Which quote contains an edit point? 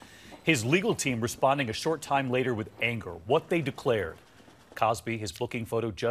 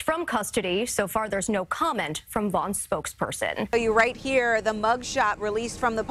second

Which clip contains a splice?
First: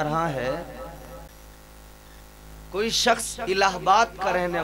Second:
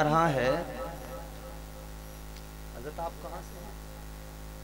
first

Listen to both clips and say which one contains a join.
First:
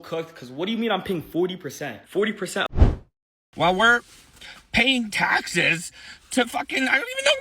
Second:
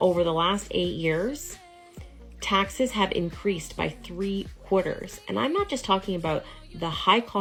first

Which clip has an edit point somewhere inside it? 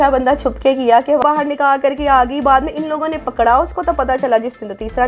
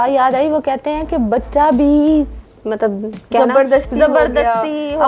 first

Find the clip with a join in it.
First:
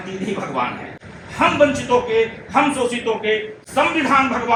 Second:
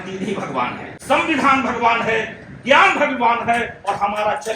second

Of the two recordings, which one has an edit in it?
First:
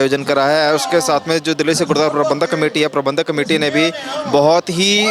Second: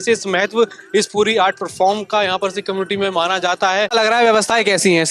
second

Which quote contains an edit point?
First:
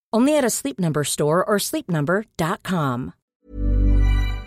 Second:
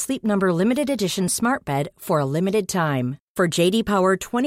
first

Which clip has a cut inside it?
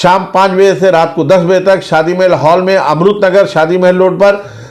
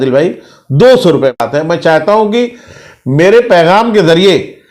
second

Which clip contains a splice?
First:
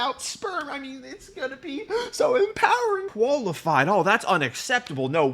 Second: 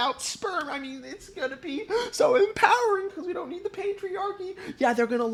first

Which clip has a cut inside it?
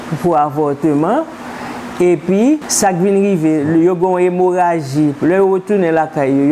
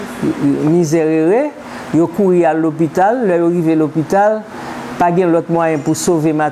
first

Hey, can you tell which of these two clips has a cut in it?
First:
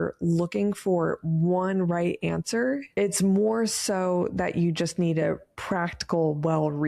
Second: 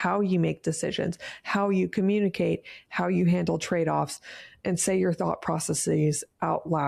first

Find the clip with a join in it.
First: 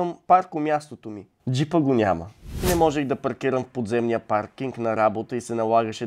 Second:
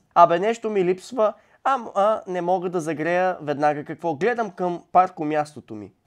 first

